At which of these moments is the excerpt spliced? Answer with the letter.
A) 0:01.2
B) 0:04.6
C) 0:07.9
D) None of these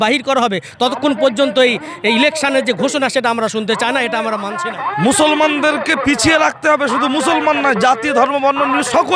B